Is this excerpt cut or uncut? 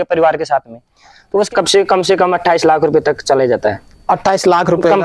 cut